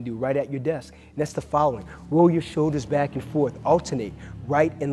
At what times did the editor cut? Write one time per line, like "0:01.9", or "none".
0:01.8

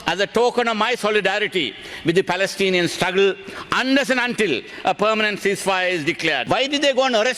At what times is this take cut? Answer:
0:06.4

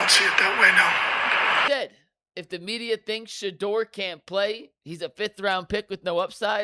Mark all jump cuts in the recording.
0:01.7

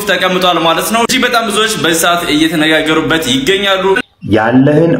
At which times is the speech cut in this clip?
0:04.0

